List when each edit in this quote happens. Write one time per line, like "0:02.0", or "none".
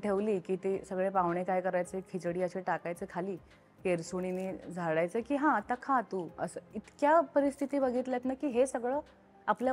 none